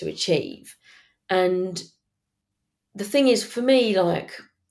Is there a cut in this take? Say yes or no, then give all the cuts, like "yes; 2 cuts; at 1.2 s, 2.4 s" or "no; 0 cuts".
no; 0 cuts